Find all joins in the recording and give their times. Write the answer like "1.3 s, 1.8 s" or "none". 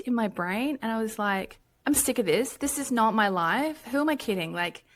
none